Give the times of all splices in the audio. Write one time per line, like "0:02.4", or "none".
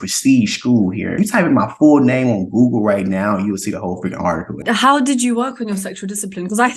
0:01.2
0:04.6